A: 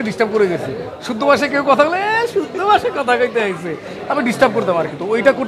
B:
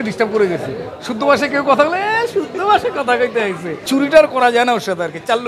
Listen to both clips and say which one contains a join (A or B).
B